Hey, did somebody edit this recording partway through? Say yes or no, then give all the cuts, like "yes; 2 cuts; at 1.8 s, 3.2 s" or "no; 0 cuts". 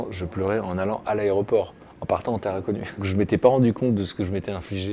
yes; 1 cut; at 3.1 s